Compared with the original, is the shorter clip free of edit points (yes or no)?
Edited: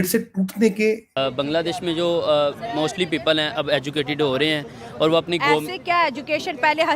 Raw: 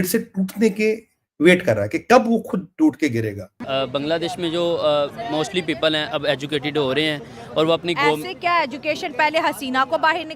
no